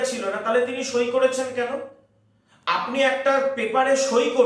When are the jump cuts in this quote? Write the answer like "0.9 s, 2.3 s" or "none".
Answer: none

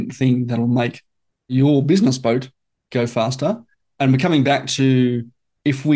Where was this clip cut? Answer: 1.5 s

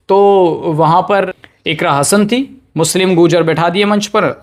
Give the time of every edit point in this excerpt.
1.3 s

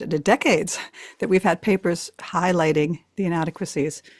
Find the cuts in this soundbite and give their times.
none

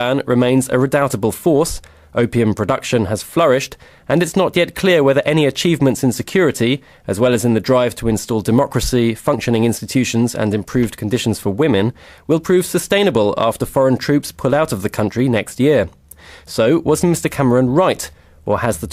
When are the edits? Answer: 9.1 s

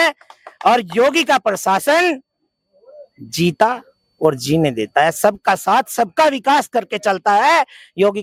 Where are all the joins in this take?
none

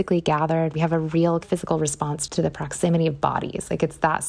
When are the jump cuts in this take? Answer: 0.7 s, 1.7 s

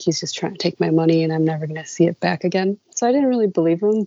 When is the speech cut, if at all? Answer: 2.9 s

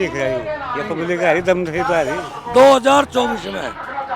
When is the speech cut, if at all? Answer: 2.3 s

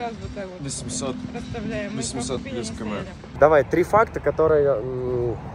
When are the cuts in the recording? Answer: 3.3 s

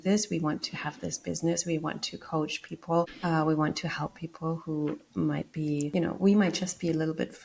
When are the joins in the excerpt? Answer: 5.9 s

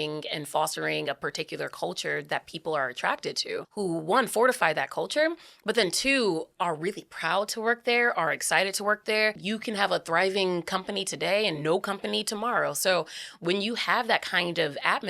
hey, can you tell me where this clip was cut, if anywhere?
3.7 s, 9.4 s

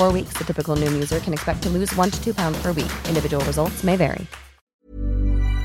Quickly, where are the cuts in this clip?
4.7 s

